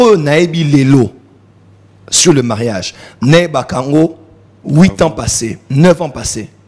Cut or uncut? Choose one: uncut